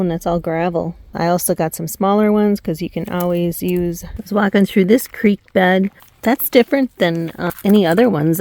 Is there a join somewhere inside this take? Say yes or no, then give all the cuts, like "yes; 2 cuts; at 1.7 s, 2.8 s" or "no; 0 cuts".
yes; 4 cuts; at 1.1 s, 4.1 s, 6.1 s, 7.4 s